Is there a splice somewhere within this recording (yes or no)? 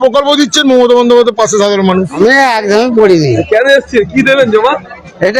yes